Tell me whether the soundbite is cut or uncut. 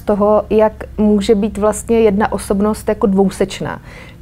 uncut